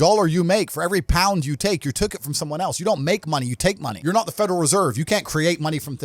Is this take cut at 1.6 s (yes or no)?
no